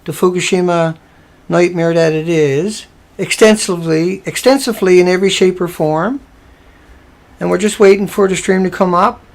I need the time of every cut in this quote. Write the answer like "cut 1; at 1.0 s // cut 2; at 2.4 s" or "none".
cut 1; at 5.7 s